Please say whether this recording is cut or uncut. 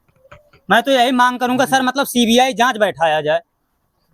uncut